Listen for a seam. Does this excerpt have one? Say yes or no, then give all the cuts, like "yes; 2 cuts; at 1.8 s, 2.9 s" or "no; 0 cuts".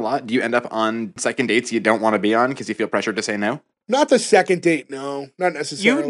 yes; 2 cuts; at 1.2 s, 3.8 s